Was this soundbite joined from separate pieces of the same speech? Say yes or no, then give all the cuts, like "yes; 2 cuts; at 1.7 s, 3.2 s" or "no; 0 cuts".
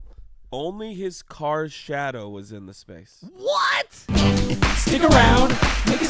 yes; 1 cut; at 4.1 s